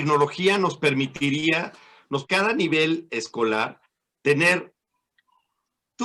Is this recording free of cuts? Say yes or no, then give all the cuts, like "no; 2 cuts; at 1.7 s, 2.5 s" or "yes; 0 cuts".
no; 1 cut; at 2.2 s